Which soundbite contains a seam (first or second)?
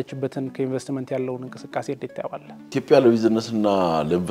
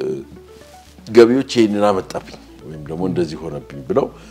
first